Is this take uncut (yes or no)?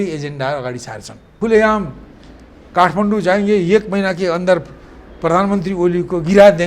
no